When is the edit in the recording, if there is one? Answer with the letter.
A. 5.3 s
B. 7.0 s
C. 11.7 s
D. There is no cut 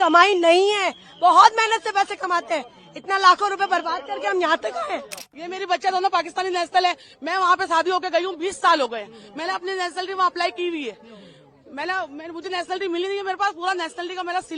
A